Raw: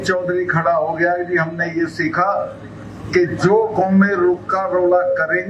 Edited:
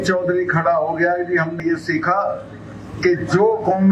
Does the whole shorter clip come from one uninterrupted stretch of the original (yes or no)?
no